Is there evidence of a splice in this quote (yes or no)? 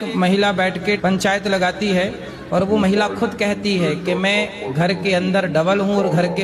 no